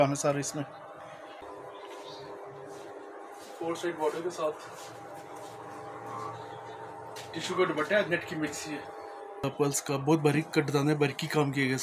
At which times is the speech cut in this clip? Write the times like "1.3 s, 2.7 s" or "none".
1.4 s, 9.4 s